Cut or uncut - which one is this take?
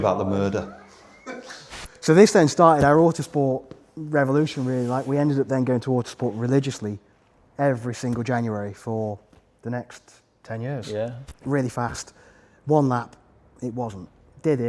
cut